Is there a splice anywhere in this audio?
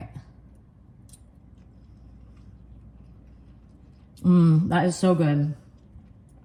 no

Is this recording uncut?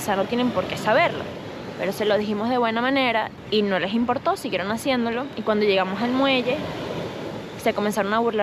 no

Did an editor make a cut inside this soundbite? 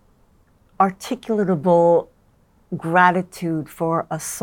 no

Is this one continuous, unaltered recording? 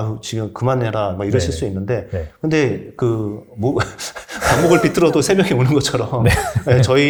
yes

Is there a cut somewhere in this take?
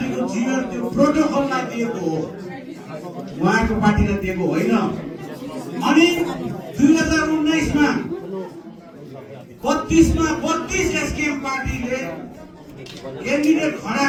no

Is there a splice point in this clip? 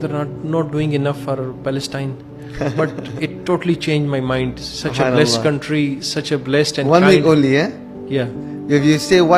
no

